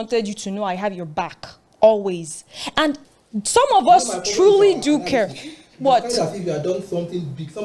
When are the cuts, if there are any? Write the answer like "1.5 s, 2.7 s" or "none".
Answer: 3.1 s

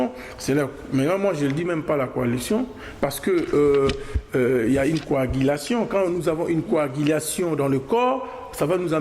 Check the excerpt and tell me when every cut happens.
none

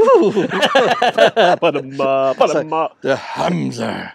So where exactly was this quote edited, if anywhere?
none

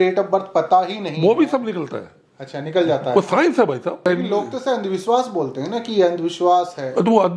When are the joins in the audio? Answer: 4.1 s

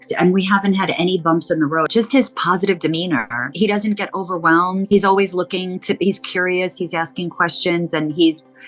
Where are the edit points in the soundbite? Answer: 1.9 s, 3.5 s, 4.8 s

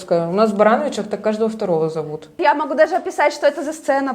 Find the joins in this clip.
2.2 s

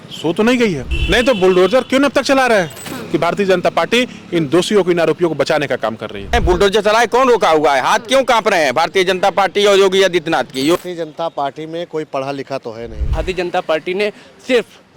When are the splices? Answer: 0.9 s, 3.0 s, 6.3 s, 10.8 s, 13.1 s

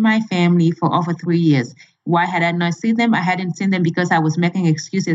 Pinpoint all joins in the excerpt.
none

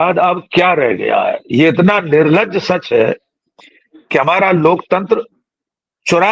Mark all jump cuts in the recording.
none

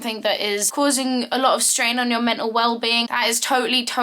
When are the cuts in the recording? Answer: none

